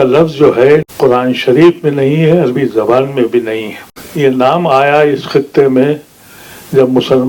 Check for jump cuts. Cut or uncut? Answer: cut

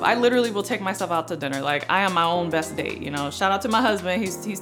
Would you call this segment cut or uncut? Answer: uncut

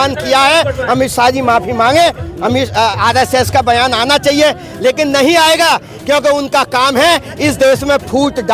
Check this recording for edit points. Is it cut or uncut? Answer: uncut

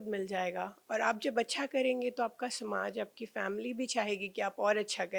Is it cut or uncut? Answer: uncut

